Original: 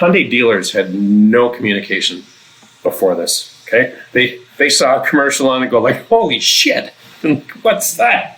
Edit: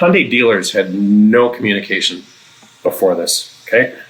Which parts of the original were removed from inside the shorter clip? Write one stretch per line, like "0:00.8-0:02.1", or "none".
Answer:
none